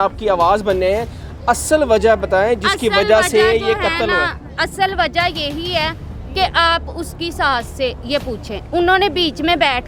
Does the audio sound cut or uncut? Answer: uncut